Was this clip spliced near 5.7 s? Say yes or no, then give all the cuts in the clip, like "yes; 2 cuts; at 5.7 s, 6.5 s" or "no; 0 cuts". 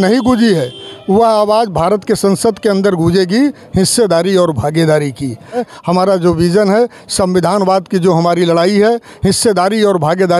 yes; 1 cut; at 5.7 s